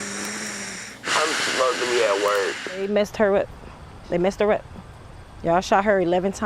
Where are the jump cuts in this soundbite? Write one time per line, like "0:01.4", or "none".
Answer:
0:02.8